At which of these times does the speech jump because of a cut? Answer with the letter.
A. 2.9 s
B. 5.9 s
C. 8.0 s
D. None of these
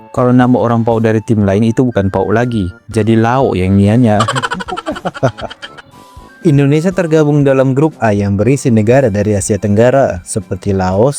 D